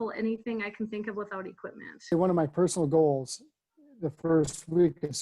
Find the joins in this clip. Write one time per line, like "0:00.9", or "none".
0:02.1